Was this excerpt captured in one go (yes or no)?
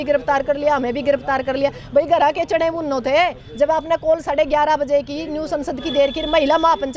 yes